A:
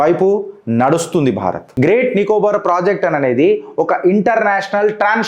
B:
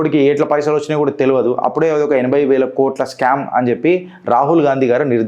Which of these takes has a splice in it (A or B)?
A